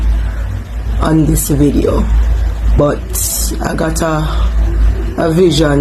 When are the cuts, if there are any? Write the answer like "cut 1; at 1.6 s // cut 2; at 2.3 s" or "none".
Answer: cut 1; at 2.8 s